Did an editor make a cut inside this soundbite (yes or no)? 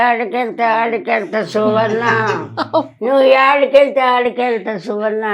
no